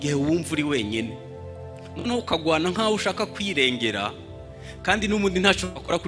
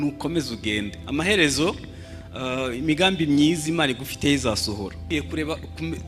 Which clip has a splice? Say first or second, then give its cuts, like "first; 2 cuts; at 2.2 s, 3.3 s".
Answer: second; 1 cut; at 4.9 s